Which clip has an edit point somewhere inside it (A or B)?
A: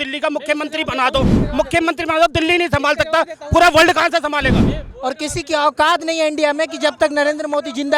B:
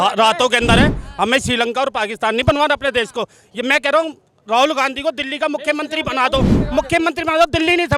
A